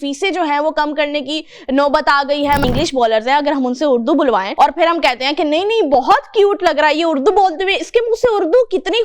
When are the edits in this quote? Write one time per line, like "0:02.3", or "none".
0:02.6
0:04.5